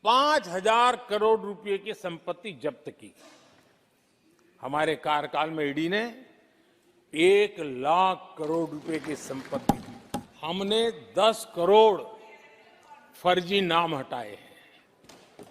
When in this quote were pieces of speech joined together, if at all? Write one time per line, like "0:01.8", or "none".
0:09.9